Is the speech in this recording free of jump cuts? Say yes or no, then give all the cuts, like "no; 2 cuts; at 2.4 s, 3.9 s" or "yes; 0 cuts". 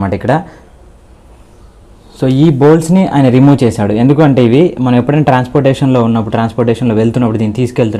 yes; 0 cuts